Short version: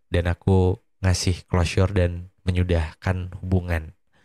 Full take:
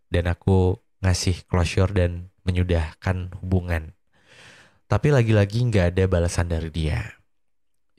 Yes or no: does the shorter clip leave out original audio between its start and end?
no